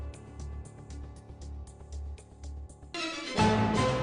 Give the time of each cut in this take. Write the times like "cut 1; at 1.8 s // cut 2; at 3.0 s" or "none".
cut 1; at 2.9 s